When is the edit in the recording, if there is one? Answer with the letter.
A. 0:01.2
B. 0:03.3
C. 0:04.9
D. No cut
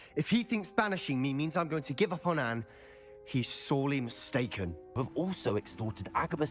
C